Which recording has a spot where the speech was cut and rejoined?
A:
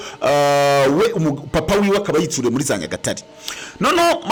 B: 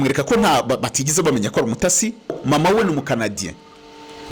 B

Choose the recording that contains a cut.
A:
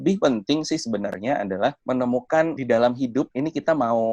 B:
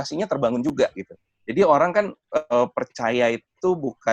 A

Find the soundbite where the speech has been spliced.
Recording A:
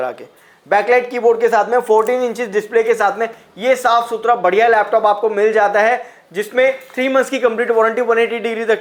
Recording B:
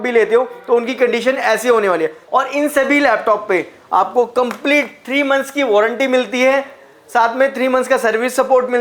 B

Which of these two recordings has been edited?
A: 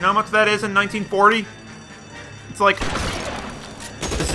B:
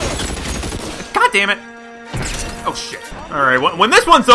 B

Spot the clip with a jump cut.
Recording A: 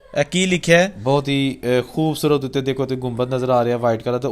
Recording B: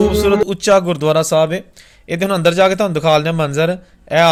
A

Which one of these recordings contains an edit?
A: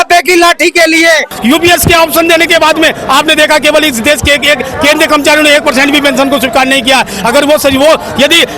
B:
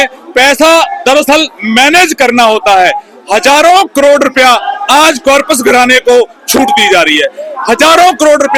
A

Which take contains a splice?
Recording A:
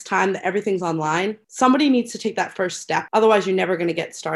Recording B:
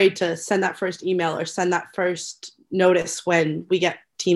A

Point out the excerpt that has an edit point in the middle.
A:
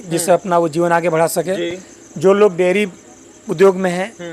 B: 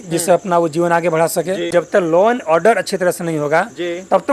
B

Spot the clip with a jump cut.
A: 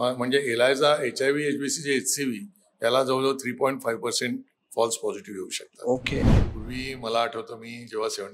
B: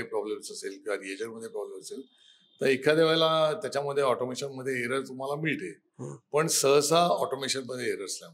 A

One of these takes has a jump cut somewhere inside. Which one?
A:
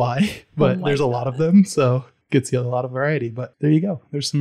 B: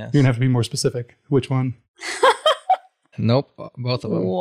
A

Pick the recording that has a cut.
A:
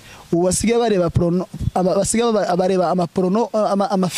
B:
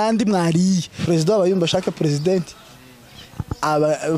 B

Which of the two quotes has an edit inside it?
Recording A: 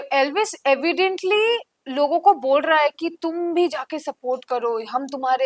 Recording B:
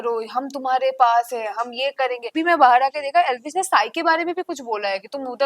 B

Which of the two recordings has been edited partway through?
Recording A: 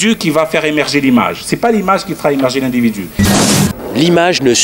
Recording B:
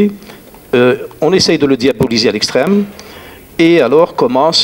A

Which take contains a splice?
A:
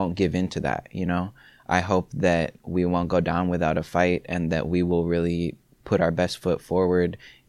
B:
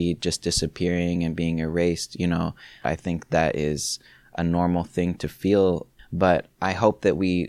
B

